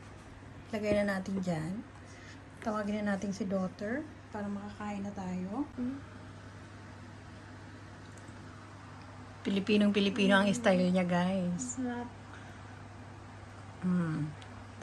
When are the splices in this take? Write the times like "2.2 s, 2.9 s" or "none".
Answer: 5.7 s